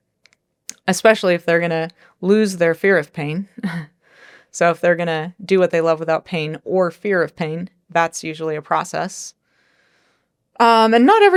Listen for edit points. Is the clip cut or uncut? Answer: uncut